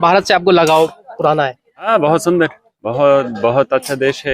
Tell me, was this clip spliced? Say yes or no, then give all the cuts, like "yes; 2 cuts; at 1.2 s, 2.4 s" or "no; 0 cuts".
yes; 1 cut; at 1.9 s